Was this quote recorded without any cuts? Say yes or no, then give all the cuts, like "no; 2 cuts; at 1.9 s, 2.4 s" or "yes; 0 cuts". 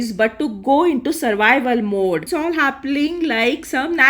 no; 1 cut; at 2.3 s